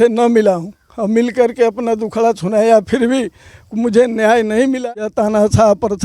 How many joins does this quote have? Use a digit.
1